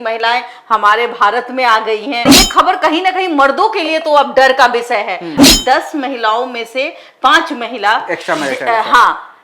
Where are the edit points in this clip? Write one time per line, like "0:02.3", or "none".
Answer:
0:02.4
0:05.4